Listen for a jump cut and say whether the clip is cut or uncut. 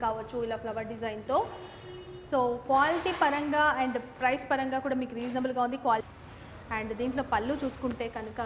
cut